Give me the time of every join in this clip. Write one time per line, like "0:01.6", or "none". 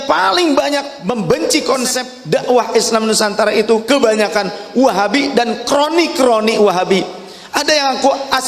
0:00.9
0:02.1

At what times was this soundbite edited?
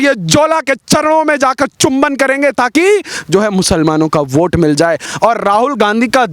0:05.1

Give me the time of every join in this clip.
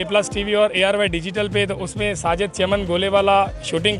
none

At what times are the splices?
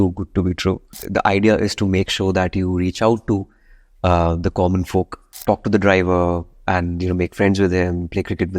0:00.9
0:05.2

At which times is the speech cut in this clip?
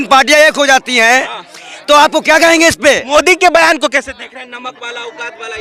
none

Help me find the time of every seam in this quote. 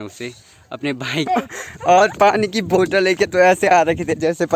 0:01.3

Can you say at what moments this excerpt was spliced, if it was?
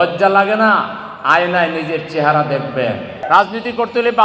0:03.2

